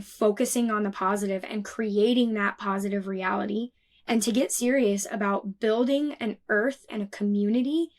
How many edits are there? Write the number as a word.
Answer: one